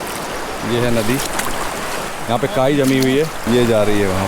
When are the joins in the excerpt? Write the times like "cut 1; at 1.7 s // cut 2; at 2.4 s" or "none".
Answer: cut 1; at 3.4 s

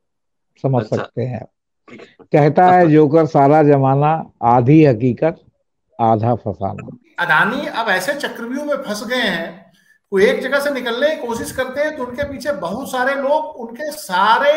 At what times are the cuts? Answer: cut 1; at 7.1 s

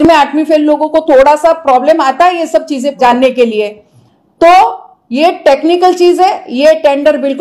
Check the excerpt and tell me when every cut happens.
none

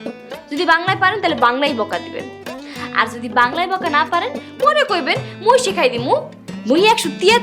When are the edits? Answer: none

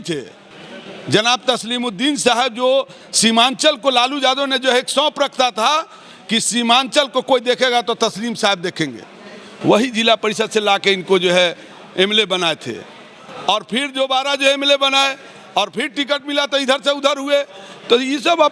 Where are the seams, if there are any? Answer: none

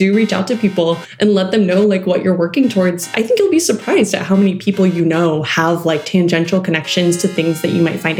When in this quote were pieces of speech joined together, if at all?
none

